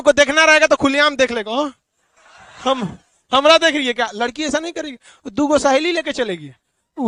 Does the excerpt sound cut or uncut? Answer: uncut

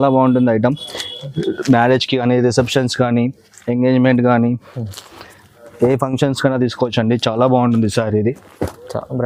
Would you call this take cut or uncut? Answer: uncut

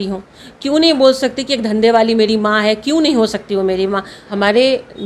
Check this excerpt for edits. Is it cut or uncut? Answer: cut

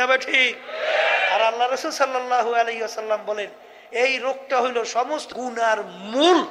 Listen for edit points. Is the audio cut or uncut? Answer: cut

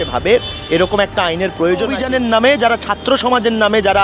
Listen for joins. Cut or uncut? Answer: cut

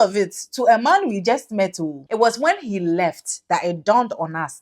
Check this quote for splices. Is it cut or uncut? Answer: cut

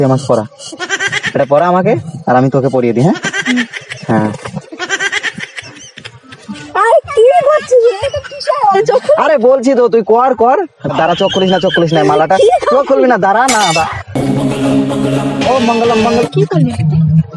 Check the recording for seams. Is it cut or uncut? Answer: cut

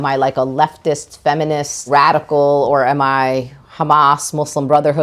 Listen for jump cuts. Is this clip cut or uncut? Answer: cut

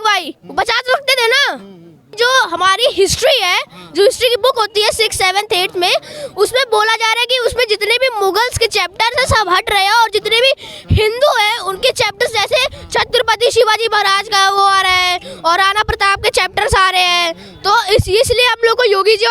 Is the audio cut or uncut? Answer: cut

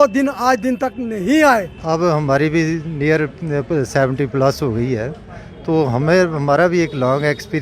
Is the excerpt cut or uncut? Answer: cut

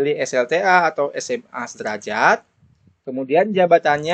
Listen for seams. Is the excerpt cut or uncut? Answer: uncut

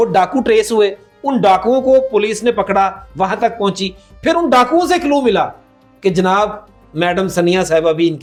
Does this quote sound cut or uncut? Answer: uncut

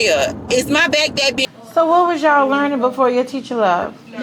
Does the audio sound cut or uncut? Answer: cut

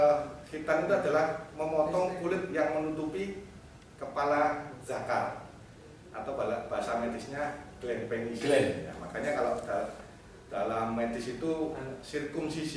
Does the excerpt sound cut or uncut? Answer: uncut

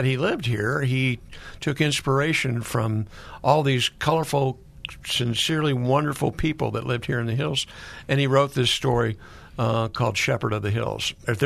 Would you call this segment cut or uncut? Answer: uncut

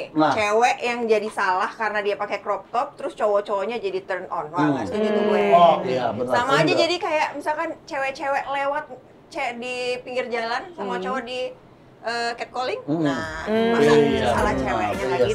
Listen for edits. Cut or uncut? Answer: uncut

